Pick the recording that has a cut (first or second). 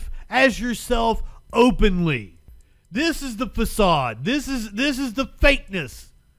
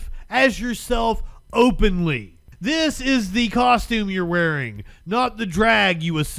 second